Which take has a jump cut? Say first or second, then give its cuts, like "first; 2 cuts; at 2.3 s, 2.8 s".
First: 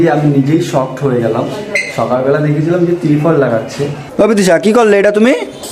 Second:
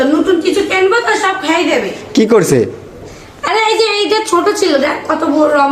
first; 1 cut; at 4.0 s